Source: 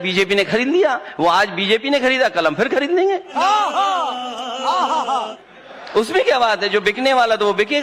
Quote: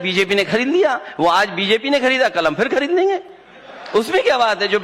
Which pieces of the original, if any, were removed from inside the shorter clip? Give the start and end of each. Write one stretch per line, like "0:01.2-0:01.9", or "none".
0:03.3-0:05.3

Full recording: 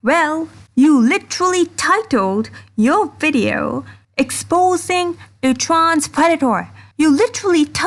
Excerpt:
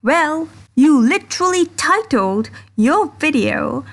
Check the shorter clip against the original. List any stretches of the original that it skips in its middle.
none

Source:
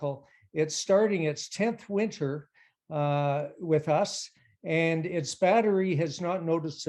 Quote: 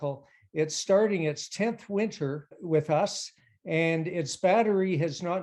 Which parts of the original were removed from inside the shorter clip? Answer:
0:02.6-0:03.5

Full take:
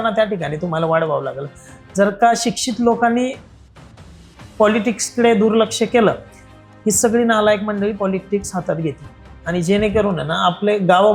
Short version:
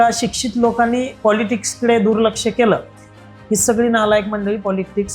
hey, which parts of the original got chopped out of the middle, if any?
0:03.4-0:04.5

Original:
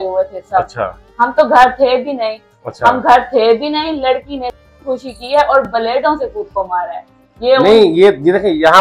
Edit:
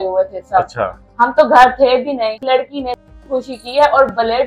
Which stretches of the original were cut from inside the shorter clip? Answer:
0:02.4-0:04.0

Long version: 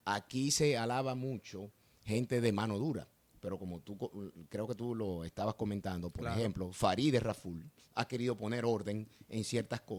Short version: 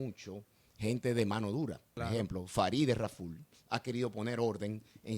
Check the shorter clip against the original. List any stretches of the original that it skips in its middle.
0:03.2-0:06.2

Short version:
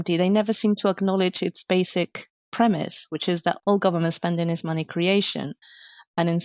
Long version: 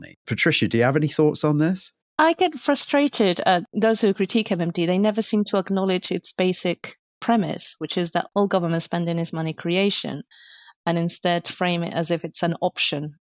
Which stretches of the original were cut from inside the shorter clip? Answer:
none

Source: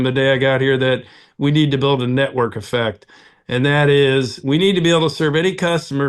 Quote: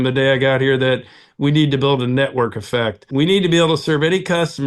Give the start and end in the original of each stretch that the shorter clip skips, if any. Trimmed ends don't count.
0:03.0-0:04.4

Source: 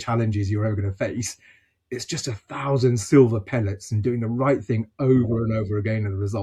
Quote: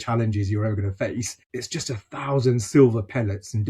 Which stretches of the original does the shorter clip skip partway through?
0:01.4-0:01.8

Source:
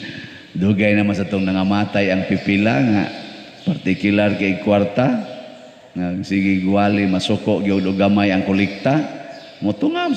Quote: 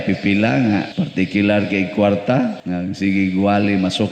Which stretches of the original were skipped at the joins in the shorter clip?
0:03.2-0:03.6
0:05.3-0:05.9

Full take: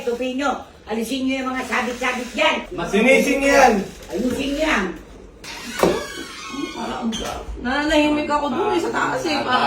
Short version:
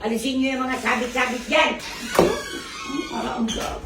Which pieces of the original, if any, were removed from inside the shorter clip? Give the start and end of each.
0:02.7-0:05.5

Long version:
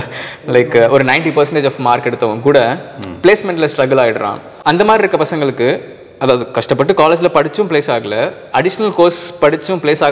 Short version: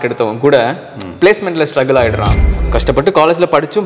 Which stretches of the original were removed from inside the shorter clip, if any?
0:04.6-0:06.4

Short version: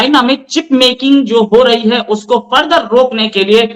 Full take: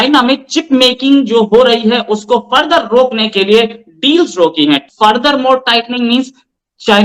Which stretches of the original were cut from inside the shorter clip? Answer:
none

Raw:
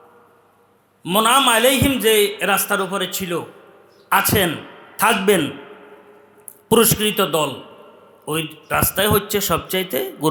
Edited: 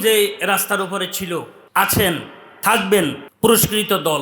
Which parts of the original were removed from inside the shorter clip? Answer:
0:03.6-0:03.9
0:05.6-0:06.5

